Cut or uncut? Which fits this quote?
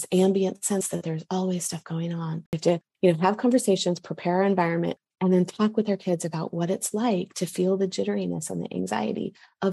cut